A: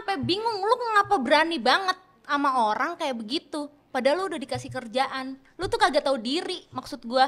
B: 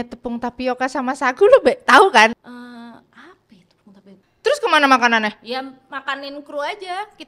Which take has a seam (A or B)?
B